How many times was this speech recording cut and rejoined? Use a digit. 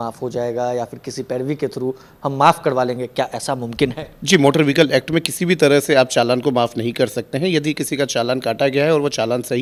0